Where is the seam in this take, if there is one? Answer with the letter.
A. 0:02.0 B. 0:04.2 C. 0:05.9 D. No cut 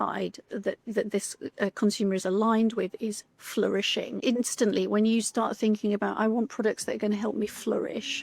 B